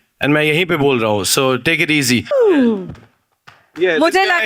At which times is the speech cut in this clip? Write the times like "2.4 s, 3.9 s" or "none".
2.2 s